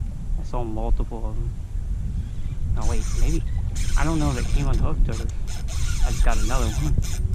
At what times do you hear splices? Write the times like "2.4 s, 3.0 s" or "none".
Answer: none